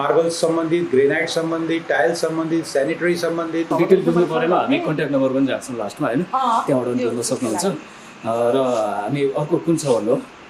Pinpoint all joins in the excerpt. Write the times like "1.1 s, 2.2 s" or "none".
3.7 s